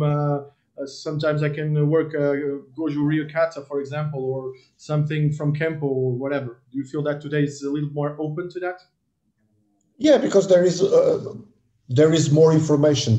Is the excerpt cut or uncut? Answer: uncut